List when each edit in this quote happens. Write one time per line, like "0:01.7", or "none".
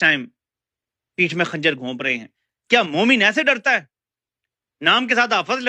0:02.4